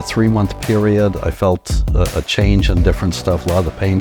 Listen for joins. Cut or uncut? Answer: uncut